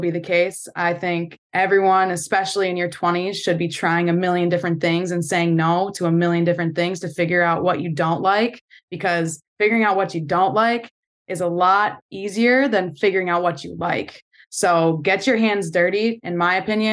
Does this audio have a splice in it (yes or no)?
no